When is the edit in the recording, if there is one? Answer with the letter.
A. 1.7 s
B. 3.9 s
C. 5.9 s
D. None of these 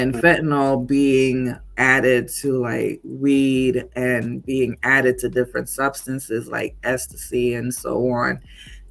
A